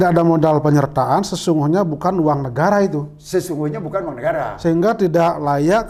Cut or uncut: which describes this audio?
uncut